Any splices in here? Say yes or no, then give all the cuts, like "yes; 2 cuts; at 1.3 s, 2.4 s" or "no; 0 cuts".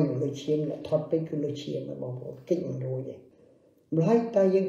yes; 1 cut; at 3.2 s